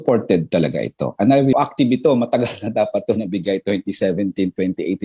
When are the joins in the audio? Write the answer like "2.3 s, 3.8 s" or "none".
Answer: 1.5 s